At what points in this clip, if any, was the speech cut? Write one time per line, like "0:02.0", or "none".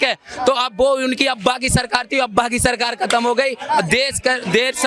none